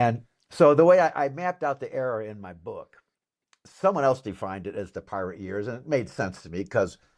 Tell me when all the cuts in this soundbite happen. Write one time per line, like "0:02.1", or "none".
none